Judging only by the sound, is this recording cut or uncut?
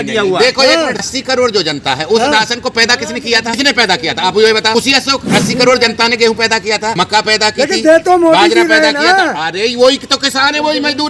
cut